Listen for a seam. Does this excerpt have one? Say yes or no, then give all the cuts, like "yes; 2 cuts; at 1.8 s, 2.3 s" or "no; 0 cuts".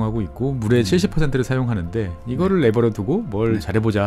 no; 0 cuts